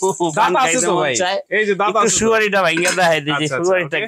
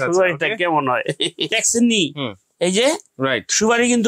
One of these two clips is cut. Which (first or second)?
second